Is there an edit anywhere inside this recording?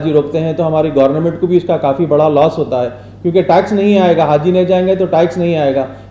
no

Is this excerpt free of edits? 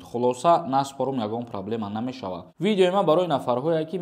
no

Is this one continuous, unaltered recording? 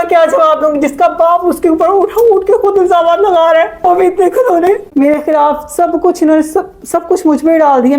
no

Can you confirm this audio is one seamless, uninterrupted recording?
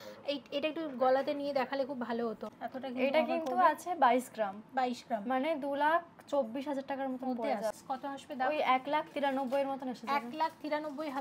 no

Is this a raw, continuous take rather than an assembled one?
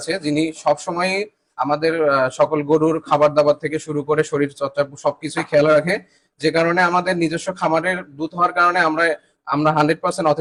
yes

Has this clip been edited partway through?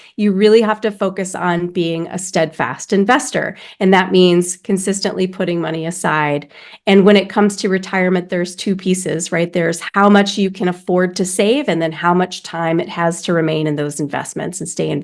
no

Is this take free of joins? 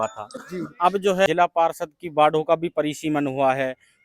no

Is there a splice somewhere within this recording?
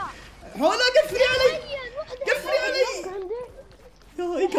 no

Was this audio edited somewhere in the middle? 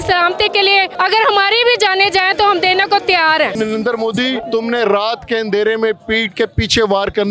yes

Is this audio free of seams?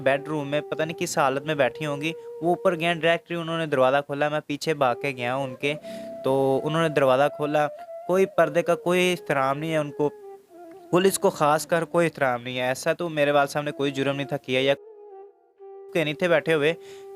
yes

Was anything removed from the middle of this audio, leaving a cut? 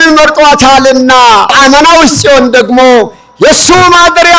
yes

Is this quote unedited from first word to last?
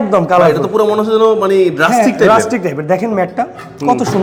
yes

